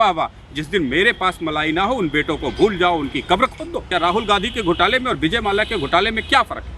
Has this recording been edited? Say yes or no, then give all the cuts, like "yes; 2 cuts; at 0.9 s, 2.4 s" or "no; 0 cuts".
yes; 1 cut; at 3.9 s